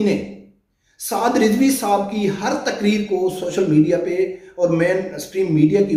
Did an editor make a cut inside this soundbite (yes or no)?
no